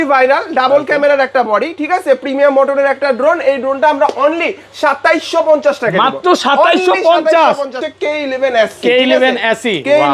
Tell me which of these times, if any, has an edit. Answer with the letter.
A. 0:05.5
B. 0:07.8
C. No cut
B